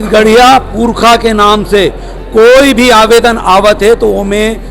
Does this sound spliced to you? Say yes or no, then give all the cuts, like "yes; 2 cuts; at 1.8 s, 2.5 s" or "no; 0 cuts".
no; 0 cuts